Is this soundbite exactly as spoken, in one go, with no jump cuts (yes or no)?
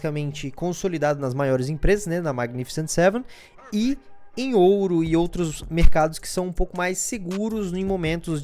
yes